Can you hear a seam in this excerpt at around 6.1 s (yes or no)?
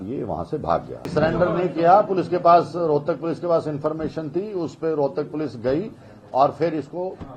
no